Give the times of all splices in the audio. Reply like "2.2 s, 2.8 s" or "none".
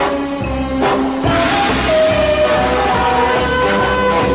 1.8 s